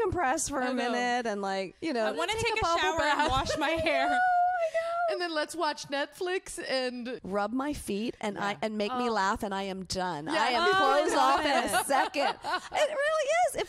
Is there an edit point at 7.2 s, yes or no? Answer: yes